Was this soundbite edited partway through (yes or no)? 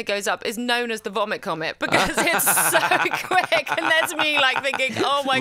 no